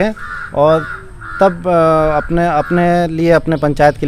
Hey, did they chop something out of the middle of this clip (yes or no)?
no